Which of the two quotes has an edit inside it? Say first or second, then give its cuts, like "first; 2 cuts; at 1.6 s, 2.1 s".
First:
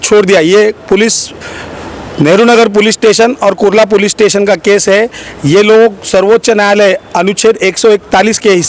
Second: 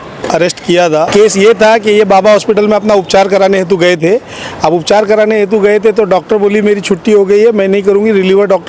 second; 1 cut; at 1.1 s